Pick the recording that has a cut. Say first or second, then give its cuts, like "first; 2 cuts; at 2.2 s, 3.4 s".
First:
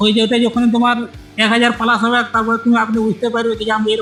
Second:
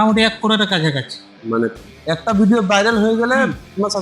second; 1 cut; at 1.7 s